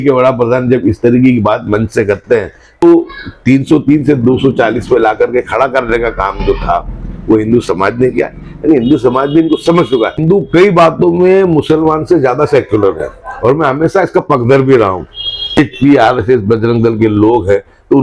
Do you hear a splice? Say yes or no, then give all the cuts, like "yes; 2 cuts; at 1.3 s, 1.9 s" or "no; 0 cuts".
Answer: yes; 3 cuts; at 2.8 s, 10.2 s, 15.6 s